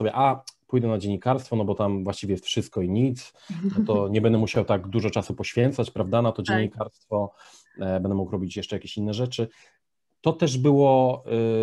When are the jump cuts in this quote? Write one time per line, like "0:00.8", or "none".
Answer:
none